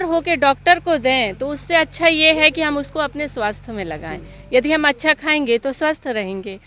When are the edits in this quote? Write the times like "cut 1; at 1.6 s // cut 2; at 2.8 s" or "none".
none